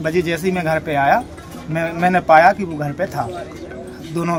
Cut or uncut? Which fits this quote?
uncut